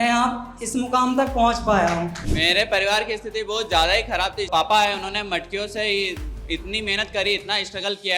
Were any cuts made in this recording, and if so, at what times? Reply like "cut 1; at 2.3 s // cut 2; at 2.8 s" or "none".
cut 1; at 2.2 s // cut 2; at 4.5 s